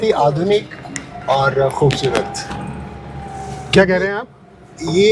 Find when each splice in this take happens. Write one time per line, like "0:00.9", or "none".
none